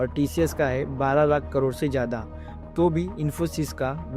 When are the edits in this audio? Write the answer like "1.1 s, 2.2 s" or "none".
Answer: none